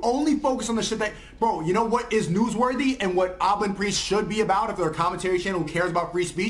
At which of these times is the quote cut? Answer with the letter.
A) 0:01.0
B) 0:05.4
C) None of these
B